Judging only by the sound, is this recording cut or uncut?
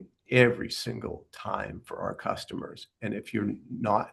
uncut